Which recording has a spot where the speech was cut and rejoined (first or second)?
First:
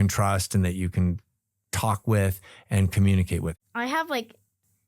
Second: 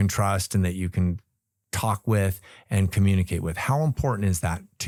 first